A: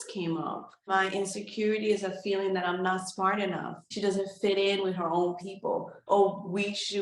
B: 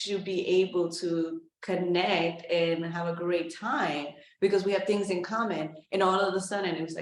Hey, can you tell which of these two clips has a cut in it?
A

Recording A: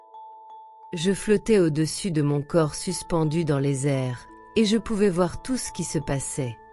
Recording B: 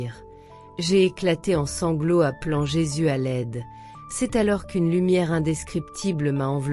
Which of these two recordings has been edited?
A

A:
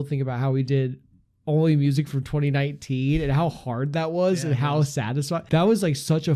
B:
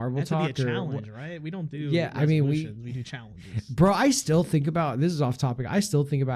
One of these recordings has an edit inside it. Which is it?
A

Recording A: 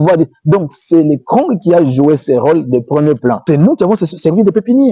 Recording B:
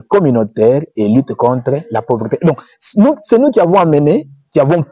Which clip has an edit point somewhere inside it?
A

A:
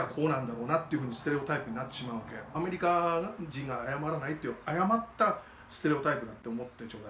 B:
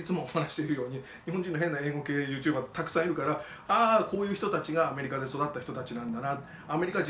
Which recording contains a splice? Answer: A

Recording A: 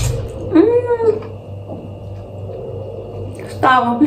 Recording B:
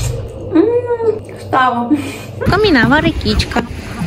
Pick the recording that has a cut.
B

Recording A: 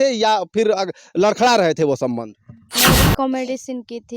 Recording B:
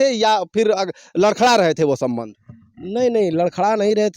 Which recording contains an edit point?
A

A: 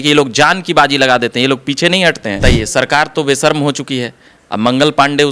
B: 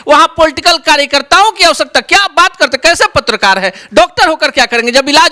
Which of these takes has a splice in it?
A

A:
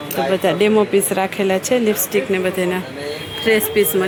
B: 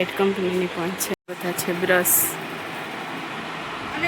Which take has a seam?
B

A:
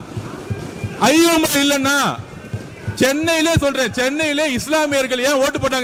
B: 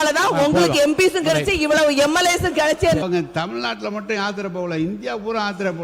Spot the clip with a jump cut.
B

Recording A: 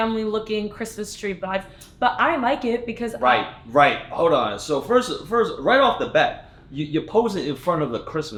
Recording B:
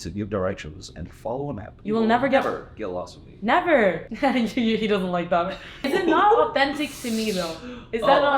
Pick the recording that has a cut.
B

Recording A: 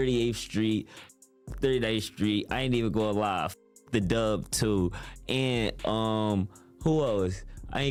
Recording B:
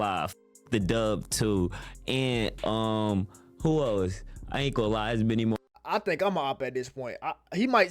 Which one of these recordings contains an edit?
B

